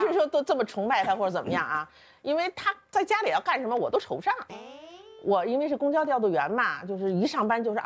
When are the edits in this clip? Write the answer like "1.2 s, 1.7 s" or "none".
none